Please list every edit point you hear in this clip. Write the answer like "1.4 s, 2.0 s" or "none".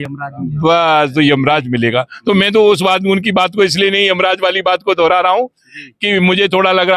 none